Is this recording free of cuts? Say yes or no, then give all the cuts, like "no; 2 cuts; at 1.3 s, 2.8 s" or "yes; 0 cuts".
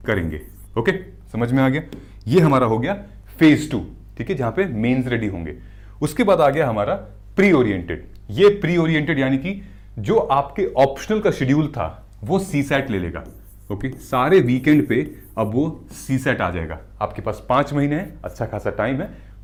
yes; 0 cuts